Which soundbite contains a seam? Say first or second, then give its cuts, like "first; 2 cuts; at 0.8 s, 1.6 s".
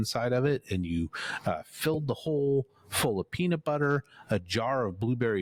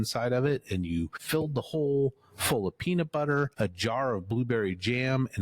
second; 2 cuts; at 1.2 s, 3.5 s